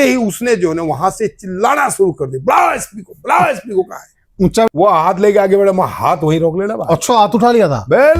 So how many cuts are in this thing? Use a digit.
1